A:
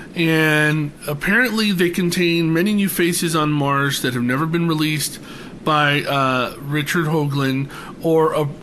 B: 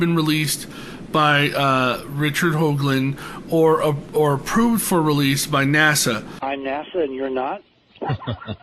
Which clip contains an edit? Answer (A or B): B